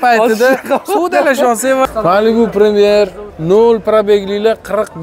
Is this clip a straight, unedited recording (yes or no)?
no